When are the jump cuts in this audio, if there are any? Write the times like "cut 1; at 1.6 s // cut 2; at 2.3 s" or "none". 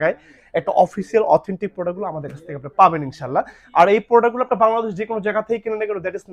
none